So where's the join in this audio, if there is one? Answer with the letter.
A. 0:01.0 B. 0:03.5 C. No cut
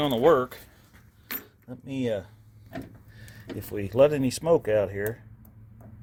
C